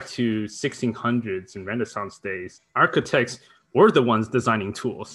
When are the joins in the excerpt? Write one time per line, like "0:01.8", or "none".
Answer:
0:02.6